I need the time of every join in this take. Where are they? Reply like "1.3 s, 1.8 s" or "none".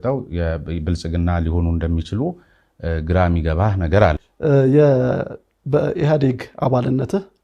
4.3 s

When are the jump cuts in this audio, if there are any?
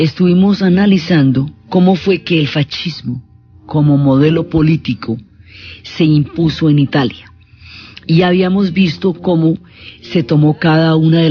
8.8 s

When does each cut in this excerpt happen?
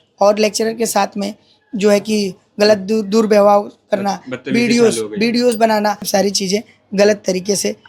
6.0 s

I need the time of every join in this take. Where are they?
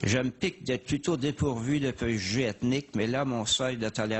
none

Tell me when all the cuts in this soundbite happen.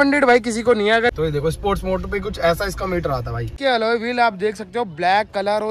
1.1 s, 3.5 s

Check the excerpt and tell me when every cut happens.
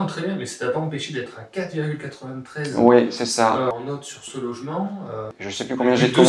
3.7 s, 5.4 s

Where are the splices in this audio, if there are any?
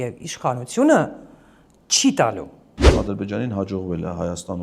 2.9 s

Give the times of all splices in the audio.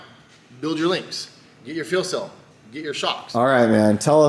3.2 s

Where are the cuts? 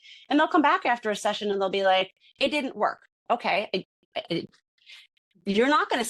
3.1 s

